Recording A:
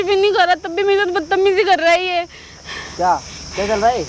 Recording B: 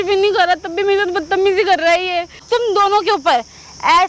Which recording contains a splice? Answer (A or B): B